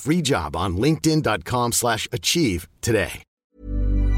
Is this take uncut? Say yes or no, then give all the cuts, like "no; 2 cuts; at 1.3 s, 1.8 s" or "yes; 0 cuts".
no; 1 cut; at 3.2 s